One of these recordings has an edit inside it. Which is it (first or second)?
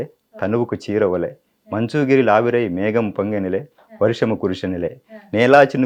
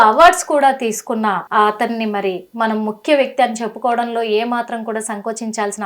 second